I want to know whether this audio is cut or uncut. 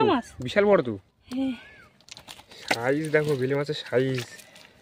uncut